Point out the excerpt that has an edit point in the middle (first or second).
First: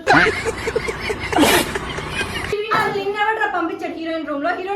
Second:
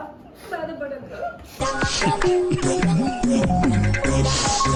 first